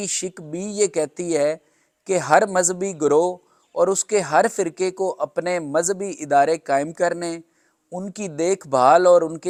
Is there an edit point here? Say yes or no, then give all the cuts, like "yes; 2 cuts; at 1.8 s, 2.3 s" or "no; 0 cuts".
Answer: no; 0 cuts